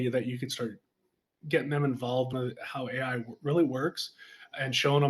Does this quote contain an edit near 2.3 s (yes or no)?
yes